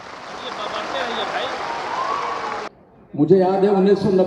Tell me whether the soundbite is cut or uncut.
cut